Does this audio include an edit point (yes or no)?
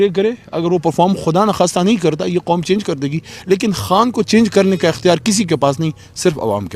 no